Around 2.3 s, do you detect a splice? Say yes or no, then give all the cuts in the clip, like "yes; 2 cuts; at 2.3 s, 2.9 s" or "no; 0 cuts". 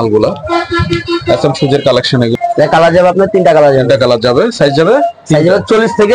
yes; 1 cut; at 2.3 s